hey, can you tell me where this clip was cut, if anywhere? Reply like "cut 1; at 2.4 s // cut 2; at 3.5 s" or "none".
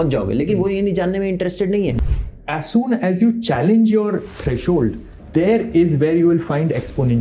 cut 1; at 2.1 s // cut 2; at 5.1 s